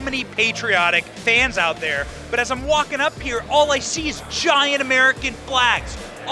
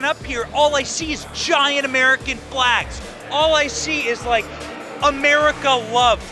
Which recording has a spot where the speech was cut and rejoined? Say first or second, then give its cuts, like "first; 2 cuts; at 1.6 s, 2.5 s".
first; 1 cut; at 1.1 s